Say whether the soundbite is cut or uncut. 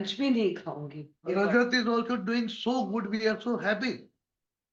cut